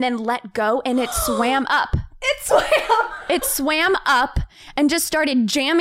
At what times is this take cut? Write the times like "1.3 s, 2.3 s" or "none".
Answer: none